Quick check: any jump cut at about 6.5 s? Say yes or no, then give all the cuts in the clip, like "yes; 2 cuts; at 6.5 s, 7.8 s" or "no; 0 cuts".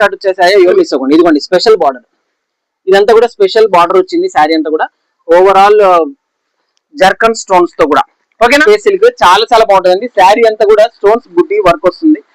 no; 2 cuts; at 0.7 s, 8.6 s